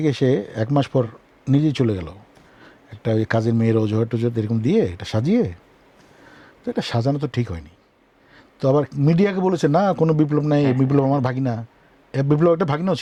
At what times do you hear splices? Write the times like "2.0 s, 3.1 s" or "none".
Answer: none